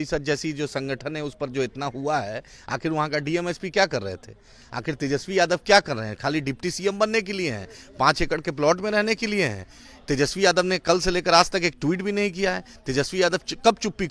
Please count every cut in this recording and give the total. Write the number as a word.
zero